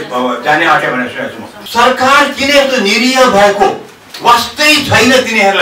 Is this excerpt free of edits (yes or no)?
no